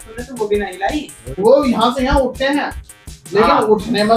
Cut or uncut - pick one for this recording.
cut